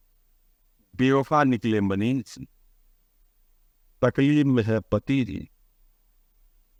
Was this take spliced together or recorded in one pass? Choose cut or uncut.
uncut